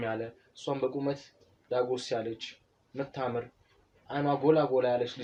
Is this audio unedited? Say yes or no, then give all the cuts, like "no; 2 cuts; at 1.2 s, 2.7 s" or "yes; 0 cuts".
yes; 0 cuts